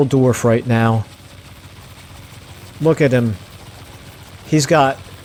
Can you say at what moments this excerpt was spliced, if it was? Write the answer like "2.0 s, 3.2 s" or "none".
none

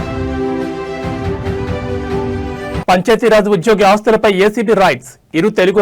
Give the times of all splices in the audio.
2.8 s

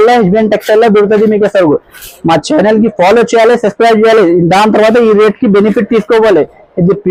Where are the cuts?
none

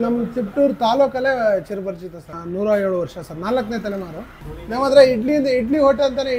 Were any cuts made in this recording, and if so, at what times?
2.3 s, 4.3 s

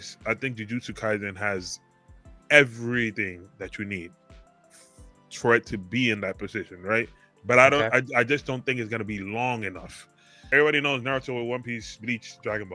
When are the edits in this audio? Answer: 10.5 s

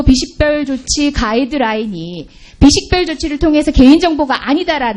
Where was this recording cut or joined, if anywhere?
none

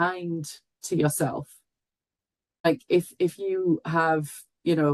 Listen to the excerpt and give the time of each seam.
2.6 s

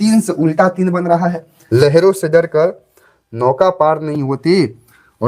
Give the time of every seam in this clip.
1.5 s

